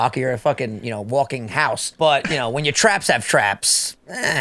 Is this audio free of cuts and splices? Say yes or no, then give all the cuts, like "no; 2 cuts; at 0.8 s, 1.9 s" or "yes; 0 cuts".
no; 1 cut; at 1.9 s